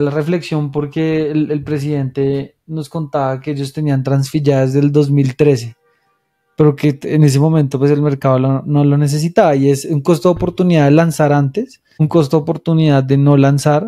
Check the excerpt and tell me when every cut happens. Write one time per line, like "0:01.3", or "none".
0:11.8